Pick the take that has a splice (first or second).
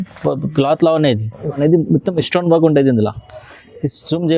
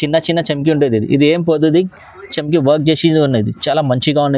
first